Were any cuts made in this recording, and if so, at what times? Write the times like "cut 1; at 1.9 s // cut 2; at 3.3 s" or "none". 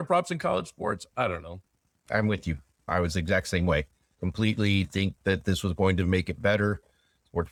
none